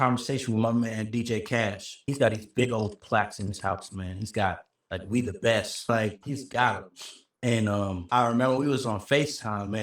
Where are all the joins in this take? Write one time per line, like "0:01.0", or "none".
0:02.0